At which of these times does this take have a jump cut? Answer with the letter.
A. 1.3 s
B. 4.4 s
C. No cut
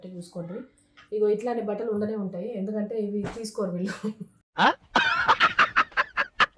C